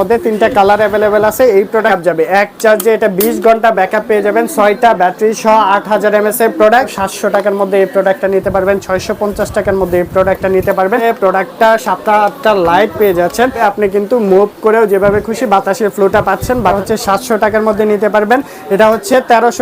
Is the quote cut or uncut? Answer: cut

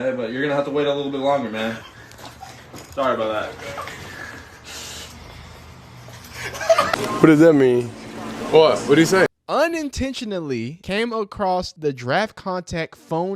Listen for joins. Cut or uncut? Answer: cut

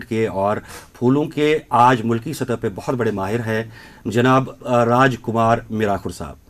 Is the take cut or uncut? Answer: uncut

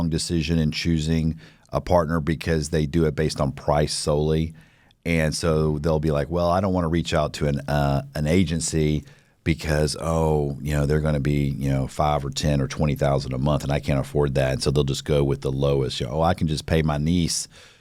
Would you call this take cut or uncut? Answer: uncut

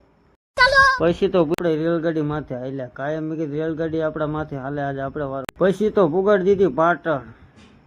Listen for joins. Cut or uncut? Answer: cut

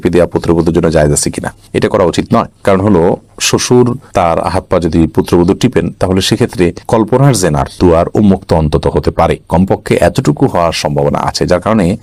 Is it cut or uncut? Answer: uncut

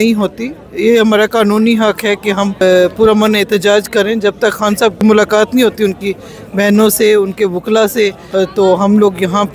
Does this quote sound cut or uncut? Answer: cut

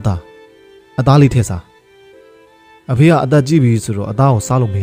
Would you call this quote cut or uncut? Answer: uncut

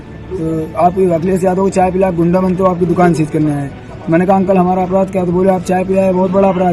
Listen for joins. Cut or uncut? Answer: uncut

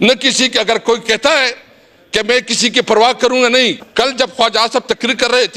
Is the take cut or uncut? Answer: cut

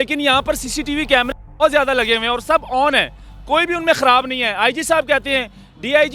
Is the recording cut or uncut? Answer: uncut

